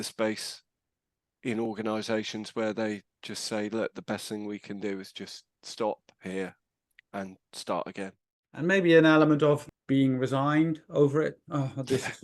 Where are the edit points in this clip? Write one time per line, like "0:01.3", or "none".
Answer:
0:08.6
0:09.7